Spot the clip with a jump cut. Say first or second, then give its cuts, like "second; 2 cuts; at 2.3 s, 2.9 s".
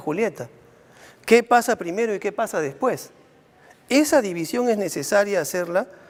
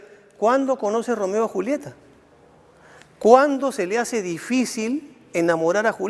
second; 1 cut; at 3.9 s